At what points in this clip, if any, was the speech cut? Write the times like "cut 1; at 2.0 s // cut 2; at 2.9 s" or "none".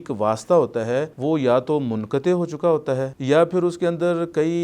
cut 1; at 1.1 s // cut 2; at 3.1 s